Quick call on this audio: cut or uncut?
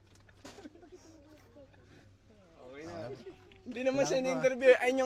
uncut